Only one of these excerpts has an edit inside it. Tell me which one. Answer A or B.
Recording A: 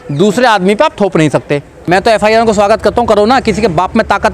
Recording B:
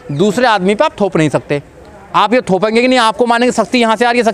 A